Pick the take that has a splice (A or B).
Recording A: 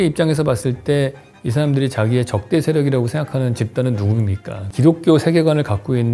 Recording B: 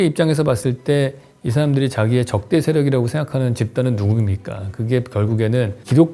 A